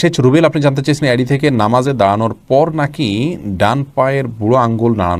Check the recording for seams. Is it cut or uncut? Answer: uncut